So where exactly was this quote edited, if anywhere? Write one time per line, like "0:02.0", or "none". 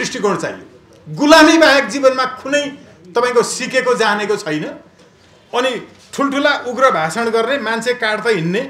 none